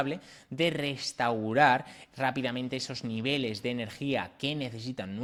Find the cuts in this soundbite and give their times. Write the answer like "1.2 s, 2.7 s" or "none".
none